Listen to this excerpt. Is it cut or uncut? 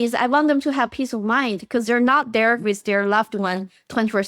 uncut